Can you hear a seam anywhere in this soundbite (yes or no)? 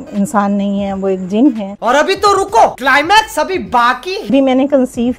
yes